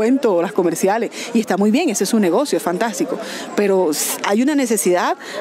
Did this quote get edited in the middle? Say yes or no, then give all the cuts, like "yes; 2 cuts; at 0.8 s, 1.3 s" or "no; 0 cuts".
no; 0 cuts